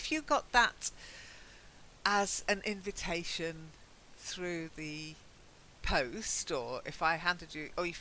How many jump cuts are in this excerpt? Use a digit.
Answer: 1